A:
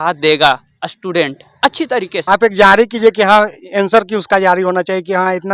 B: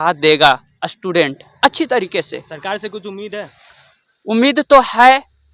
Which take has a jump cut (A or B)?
A